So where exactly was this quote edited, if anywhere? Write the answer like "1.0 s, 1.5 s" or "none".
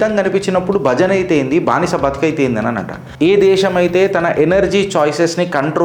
3.0 s